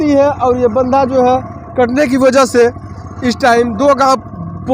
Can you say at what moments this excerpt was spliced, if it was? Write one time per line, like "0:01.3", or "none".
none